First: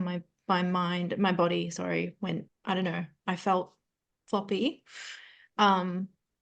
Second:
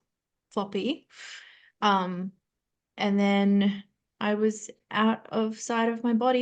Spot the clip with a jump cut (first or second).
first